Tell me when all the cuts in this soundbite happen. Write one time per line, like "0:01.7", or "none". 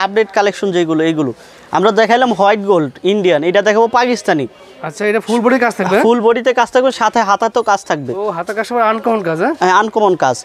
none